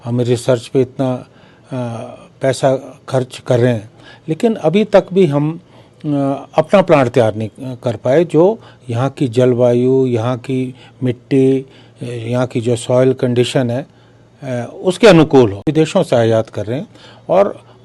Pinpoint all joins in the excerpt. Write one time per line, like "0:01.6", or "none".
none